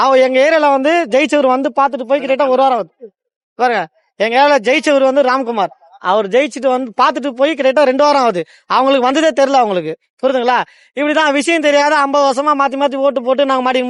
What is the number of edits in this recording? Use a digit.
0